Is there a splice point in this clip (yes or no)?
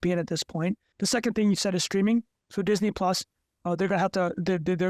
yes